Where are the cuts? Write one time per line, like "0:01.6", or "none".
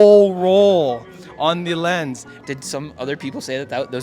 0:02.4